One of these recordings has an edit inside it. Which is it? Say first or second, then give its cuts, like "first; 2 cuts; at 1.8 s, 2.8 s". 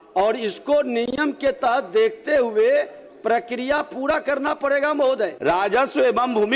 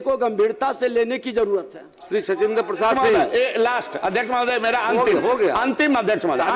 first; 1 cut; at 5.4 s